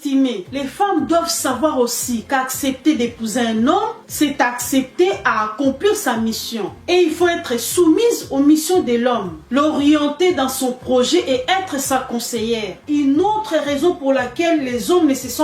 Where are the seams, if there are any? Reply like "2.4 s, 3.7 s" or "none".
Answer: 12.8 s